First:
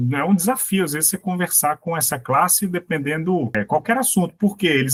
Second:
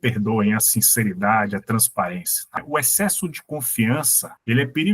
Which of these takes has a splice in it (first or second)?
second